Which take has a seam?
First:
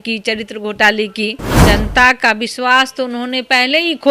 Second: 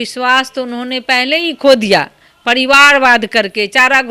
first; 1 cut; at 1.5 s

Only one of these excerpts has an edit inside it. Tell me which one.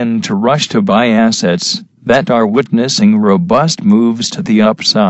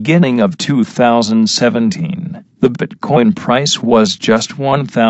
second; 1 cut; at 2.9 s

